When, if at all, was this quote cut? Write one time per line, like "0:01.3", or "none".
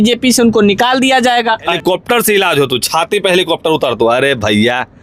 0:01.8